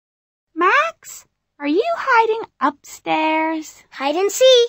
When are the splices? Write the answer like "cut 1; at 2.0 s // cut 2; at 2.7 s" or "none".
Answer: none